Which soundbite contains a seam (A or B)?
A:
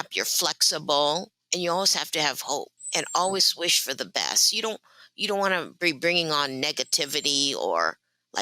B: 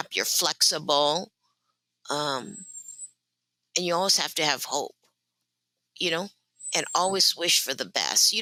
A